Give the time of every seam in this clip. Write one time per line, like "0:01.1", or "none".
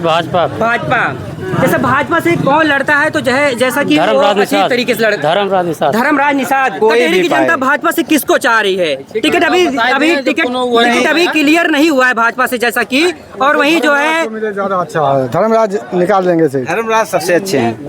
0:06.7